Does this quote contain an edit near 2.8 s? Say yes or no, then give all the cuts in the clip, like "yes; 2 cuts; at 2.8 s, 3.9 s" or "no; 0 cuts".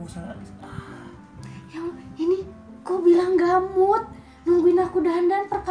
no; 1 cut; at 1.5 s